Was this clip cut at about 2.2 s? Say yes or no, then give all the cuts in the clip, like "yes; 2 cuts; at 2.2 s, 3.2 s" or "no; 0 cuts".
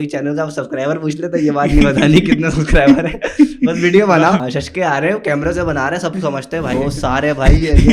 no; 2 cuts; at 4.4 s, 6.7 s